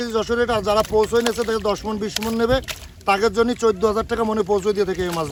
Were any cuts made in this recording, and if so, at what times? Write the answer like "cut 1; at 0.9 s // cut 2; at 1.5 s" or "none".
none